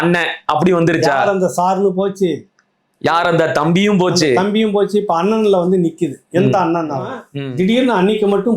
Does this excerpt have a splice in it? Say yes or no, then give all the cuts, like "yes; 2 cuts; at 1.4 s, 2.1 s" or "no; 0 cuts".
yes; 1 cut; at 7.3 s